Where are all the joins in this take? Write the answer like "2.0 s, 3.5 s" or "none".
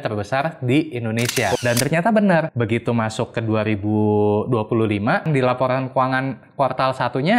1.6 s, 2.5 s, 5.2 s